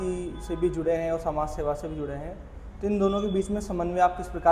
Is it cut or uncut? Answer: uncut